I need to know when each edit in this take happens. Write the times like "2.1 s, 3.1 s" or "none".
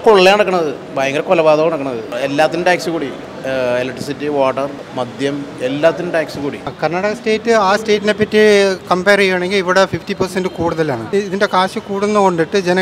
2.1 s, 3.3 s, 4.8 s, 6.7 s, 11.0 s